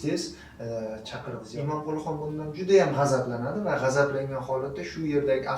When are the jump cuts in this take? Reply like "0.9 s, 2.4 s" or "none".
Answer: 1.4 s